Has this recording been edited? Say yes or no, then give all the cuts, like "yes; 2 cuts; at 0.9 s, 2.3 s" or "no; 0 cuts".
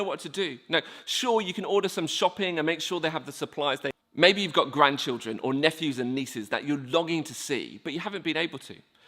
yes; 1 cut; at 3.9 s